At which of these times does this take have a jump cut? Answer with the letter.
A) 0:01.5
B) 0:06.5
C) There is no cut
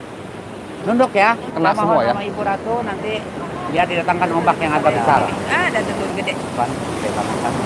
A